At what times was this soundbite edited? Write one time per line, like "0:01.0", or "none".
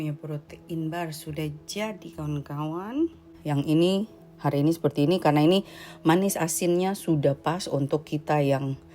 0:03.3

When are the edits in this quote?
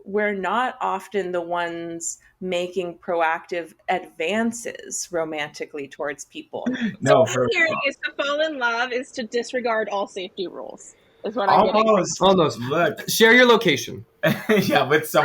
0:06.6

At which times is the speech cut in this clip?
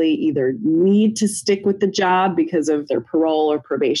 0:02.9

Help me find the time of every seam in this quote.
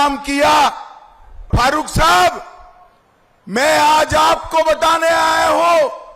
0:01.5

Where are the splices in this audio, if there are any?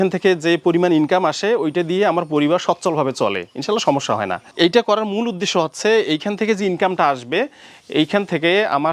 0:04.4

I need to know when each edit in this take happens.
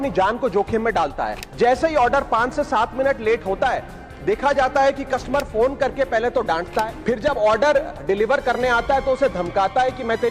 0:01.4
0:07.0

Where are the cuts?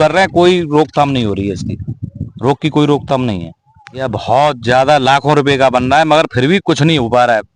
none

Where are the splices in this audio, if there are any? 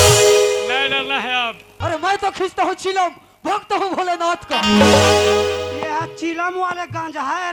0:01.7

